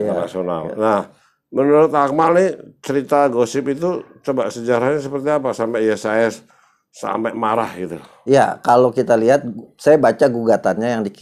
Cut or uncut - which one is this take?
uncut